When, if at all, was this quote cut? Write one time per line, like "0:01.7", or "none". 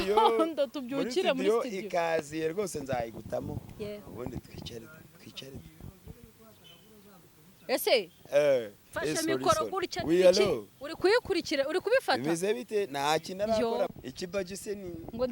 0:13.9